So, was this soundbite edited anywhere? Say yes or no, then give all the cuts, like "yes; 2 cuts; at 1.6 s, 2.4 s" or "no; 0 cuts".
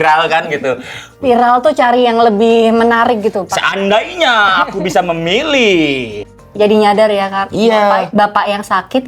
yes; 2 cuts; at 1.2 s, 6.5 s